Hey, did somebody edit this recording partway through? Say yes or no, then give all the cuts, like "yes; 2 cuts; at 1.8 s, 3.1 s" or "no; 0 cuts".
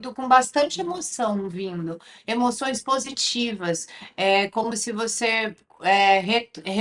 no; 0 cuts